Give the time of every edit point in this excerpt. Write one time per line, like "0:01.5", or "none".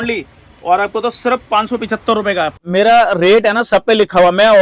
0:02.5